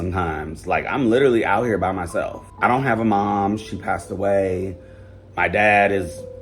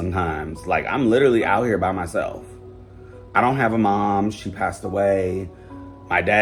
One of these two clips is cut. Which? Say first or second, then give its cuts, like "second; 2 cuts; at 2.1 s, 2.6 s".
first; 1 cut; at 2.4 s